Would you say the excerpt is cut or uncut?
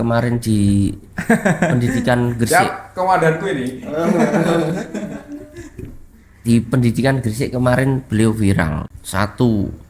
cut